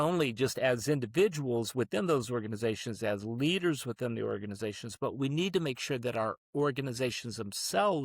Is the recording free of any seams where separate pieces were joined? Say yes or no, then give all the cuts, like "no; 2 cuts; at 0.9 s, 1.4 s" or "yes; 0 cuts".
yes; 0 cuts